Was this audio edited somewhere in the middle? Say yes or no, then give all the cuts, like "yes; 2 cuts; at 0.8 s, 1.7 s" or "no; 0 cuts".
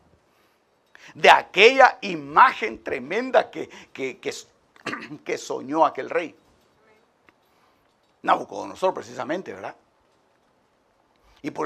no; 0 cuts